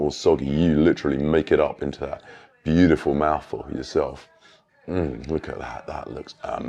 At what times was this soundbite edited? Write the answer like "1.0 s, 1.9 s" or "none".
none